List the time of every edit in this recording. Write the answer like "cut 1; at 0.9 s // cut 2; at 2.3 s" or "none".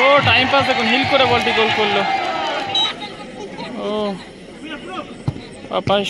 cut 1; at 2.8 s